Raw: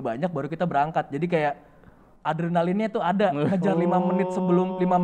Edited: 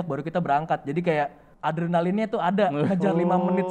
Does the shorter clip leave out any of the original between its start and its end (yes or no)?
yes